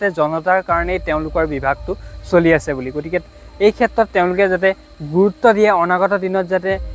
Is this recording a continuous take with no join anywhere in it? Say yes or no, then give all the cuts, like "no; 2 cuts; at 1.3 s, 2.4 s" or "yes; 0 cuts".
yes; 0 cuts